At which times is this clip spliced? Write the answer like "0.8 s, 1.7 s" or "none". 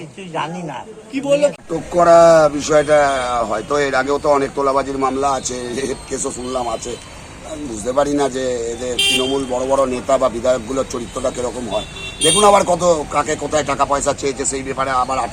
1.5 s